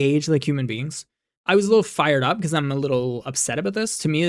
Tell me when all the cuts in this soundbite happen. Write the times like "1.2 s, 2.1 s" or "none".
1.3 s